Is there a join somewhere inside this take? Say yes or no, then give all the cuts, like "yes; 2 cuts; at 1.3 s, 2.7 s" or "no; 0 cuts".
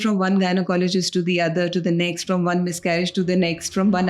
no; 0 cuts